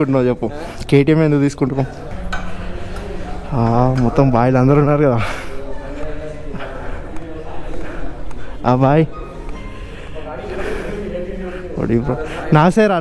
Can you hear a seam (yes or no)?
yes